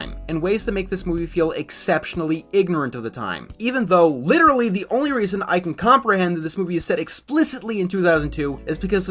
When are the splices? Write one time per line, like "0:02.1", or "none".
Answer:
none

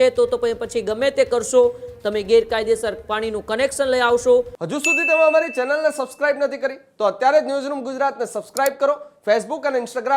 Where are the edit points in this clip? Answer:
0:04.6

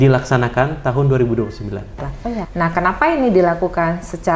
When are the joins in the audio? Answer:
0:02.5

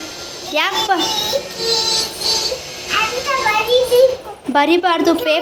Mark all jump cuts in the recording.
none

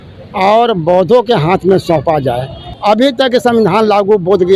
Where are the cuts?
0:02.7

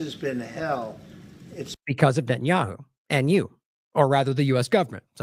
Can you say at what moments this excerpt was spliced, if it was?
none

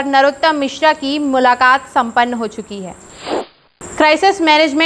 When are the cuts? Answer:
0:03.4

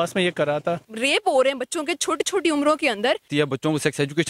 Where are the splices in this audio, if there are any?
0:00.9
0:03.3

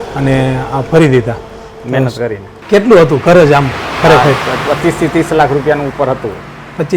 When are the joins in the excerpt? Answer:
0:02.5

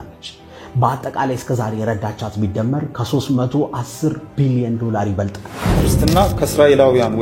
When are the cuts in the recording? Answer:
0:05.8

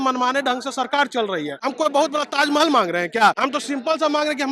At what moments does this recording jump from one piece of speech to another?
0:01.6
0:03.4

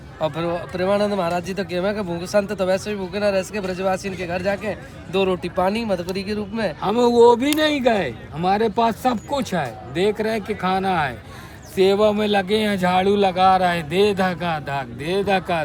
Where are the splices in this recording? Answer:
none

